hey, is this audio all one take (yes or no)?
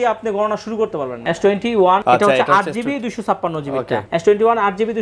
no